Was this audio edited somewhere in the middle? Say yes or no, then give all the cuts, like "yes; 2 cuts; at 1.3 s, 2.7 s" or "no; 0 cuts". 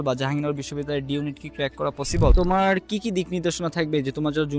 yes; 1 cut; at 2.3 s